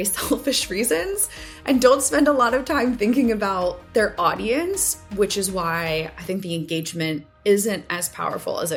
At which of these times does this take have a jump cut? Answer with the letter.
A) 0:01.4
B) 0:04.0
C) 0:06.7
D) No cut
D